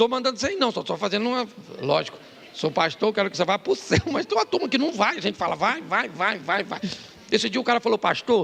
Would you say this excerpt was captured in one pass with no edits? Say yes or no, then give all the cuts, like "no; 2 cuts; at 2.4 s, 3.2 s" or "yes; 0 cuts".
yes; 0 cuts